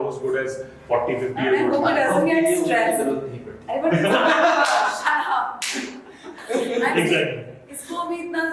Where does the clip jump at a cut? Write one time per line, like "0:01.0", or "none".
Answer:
none